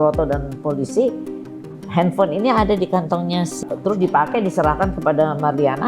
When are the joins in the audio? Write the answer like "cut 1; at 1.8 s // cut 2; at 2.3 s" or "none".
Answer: cut 1; at 3.6 s